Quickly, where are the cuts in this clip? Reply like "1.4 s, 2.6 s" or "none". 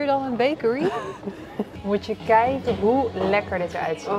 1.6 s